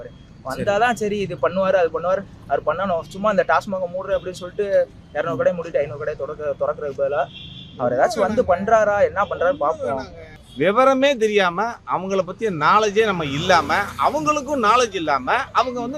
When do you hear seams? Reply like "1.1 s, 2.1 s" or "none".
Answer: 10.2 s